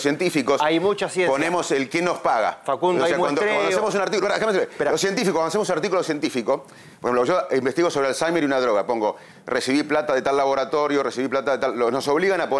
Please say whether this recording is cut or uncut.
uncut